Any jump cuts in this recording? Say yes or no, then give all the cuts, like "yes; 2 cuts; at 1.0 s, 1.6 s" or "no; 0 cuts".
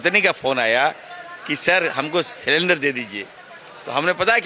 no; 0 cuts